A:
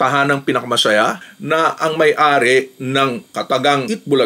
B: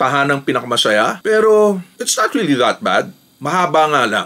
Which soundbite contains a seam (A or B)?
A